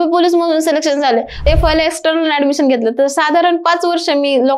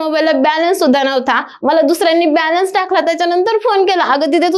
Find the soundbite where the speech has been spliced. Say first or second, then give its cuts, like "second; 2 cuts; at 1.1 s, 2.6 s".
first; 1 cut; at 1.4 s